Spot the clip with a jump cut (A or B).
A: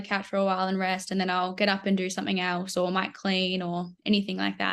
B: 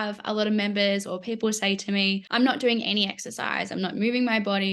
B